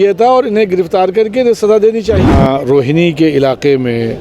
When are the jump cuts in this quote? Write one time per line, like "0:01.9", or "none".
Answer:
0:02.2